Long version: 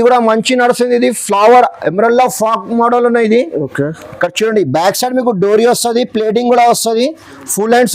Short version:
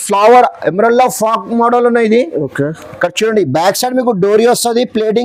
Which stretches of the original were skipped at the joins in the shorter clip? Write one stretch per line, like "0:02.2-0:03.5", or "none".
none